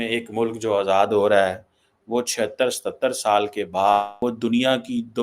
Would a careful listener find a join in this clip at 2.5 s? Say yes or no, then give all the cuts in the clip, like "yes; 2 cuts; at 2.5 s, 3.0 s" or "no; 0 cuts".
no; 1 cut; at 4.1 s